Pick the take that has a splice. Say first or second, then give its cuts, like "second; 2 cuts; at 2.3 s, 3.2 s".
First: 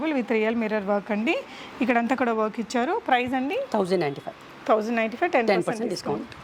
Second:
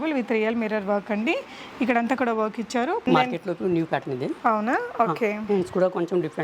second; 1 cut; at 3.1 s